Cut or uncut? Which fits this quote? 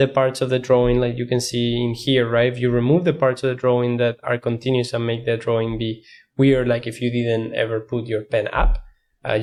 uncut